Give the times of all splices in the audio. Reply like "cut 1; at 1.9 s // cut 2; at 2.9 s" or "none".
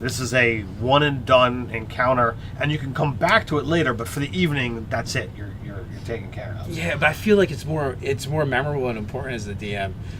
none

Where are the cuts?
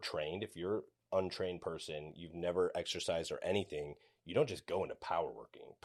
none

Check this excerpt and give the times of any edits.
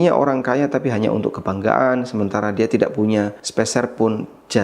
cut 1; at 3.4 s

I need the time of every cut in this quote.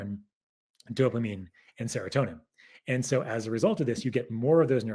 none

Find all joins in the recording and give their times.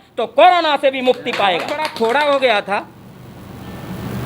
cut 1; at 1.8 s

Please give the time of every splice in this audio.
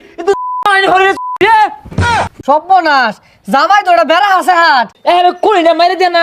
cut 1; at 2.1 s // cut 2; at 4.9 s

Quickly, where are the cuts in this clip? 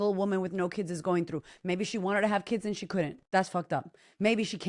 cut 1; at 3.2 s

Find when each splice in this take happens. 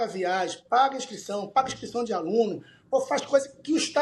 none

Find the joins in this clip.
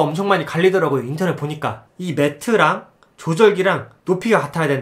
cut 1; at 1.8 s

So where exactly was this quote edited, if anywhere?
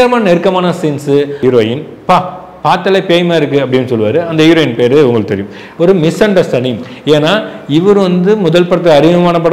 cut 1; at 1.4 s // cut 2; at 5.6 s

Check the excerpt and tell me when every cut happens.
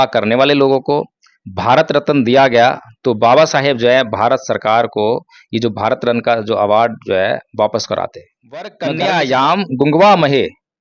cut 1; at 8.8 s

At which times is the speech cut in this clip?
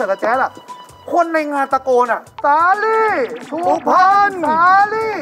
cut 1; at 2.3 s

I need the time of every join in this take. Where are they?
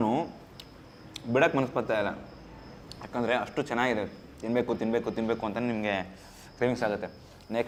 none

